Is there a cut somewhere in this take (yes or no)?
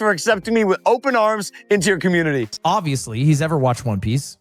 yes